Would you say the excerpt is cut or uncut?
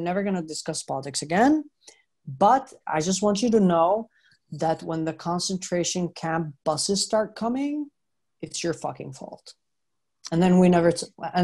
cut